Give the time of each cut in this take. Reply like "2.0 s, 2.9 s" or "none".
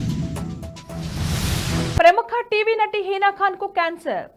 2.0 s

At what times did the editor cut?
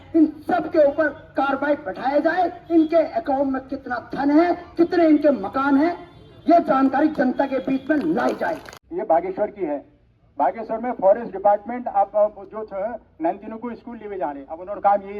8.8 s

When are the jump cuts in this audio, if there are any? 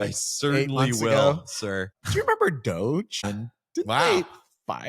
1.9 s, 3.3 s

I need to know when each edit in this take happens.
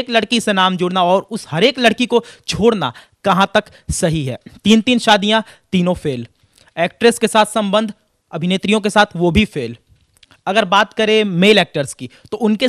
none

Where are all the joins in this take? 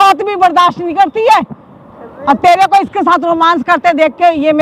none

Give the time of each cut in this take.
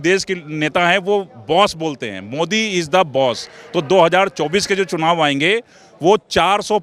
none

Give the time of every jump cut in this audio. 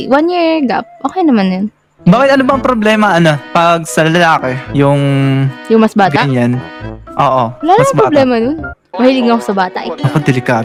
none

